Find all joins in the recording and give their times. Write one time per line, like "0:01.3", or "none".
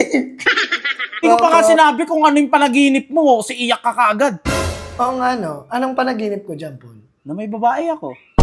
0:01.2